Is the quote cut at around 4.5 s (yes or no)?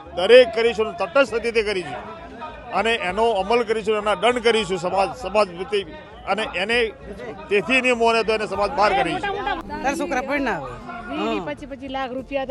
no